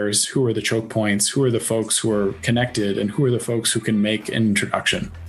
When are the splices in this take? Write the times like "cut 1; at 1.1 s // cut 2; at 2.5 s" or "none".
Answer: none